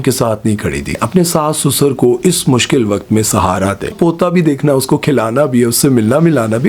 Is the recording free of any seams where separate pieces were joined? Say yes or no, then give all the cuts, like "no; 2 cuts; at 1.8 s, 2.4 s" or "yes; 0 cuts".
no; 2 cuts; at 1.0 s, 3.9 s